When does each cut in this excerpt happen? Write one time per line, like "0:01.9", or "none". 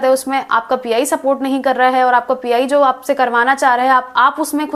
none